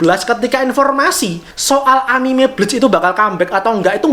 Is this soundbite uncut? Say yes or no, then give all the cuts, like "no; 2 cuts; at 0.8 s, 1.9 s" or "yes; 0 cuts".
yes; 0 cuts